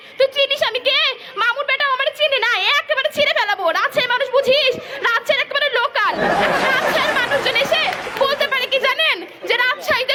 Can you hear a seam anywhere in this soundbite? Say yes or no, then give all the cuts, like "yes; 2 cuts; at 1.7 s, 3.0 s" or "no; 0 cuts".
no; 0 cuts